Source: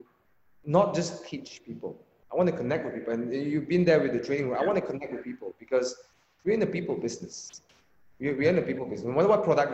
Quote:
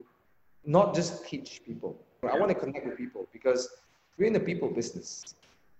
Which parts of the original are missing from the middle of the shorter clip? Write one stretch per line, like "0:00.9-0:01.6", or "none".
0:02.2-0:04.5